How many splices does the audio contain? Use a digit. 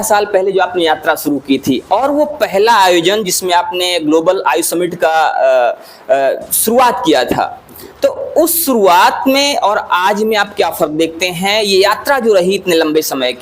0